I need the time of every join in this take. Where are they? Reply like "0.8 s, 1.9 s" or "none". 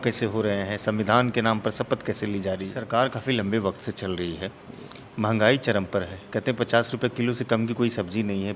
2.8 s